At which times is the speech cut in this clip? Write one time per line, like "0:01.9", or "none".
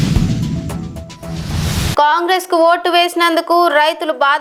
none